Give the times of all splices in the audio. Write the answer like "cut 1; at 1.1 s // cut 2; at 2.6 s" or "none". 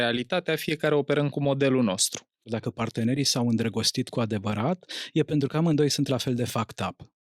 cut 1; at 2.5 s